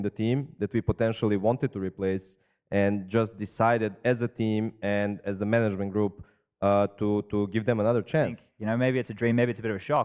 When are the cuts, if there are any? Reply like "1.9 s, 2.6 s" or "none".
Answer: 8.5 s